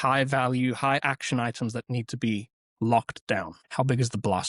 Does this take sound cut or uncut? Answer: cut